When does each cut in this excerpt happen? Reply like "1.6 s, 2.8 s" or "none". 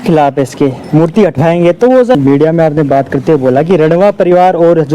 2.2 s